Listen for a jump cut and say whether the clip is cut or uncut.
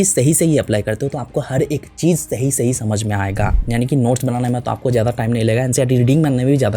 cut